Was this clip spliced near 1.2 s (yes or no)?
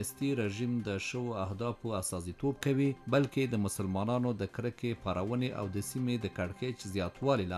no